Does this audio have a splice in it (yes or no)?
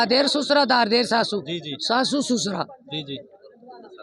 no